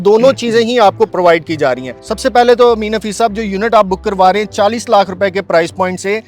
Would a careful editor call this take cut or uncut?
uncut